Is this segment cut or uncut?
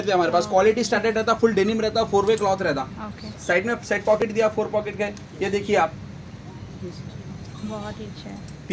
uncut